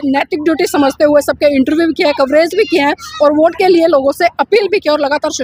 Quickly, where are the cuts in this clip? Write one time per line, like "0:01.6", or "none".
none